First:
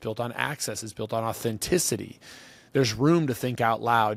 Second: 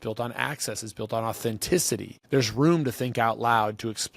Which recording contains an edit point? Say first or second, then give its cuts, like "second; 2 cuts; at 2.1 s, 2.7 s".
second; 1 cut; at 2.1 s